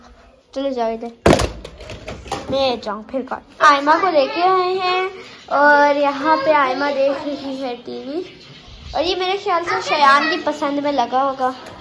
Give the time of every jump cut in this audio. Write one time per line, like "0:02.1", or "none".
0:03.5